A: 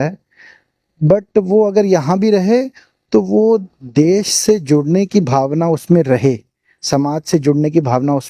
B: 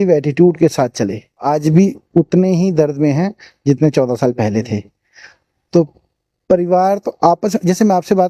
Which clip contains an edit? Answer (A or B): B